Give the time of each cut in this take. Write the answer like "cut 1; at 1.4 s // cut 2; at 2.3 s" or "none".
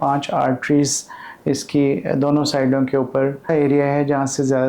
cut 1; at 3.4 s